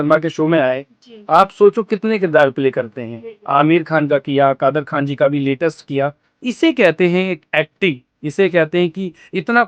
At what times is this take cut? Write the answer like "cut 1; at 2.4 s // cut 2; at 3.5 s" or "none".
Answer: none